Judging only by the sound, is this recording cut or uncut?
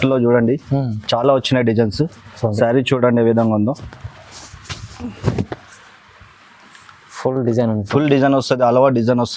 uncut